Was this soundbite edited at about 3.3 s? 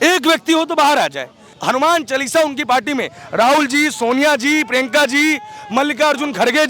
no; 1 cut; at 1.6 s

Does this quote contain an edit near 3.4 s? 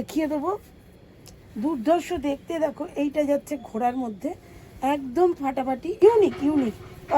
no; 2 cuts; at 1.4 s, 6.0 s

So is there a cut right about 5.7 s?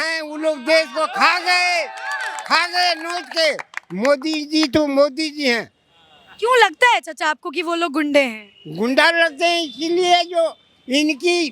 no; 0 cuts

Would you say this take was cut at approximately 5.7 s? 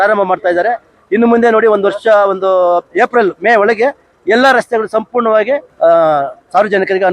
yes; 1 cut; at 5.7 s

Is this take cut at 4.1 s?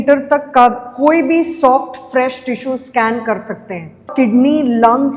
yes; 1 cut; at 4.1 s

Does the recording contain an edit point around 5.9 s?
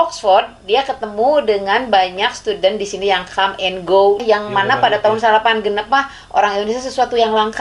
no; 1 cut; at 4.2 s

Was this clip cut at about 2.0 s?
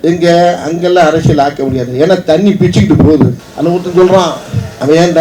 no; 1 cut; at 3.4 s

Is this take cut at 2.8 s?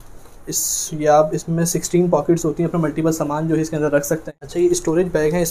no; 1 cut; at 4.3 s

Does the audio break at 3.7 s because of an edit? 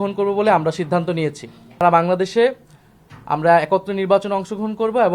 no; 1 cut; at 1.8 s

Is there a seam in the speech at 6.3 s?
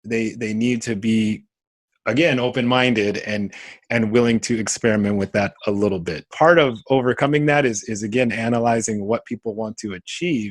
yes; 1 cut; at 6.3 s

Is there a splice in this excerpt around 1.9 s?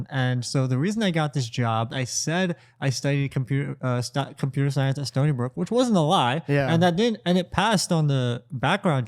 yes; 1 cut; at 1.9 s

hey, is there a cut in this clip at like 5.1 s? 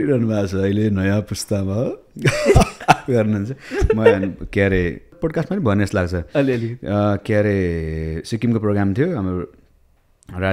yes; 1 cut; at 5.1 s

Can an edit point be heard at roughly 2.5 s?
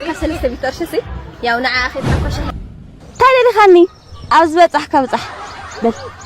yes; 1 cut; at 2.5 s

